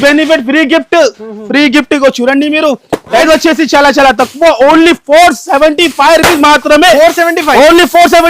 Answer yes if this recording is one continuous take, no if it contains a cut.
no